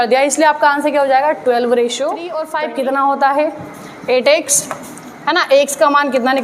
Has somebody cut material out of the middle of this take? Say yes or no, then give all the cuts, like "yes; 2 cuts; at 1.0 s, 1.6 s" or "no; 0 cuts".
yes; 1 cut; at 2.4 s